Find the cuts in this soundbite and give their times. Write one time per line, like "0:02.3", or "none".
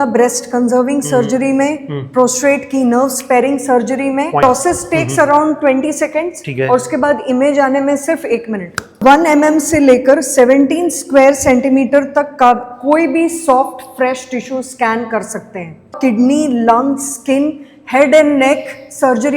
0:04.4
0:09.0
0:15.9